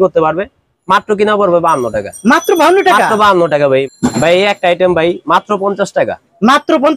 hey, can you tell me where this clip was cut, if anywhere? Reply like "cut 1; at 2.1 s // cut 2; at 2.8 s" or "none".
cut 1; at 4.1 s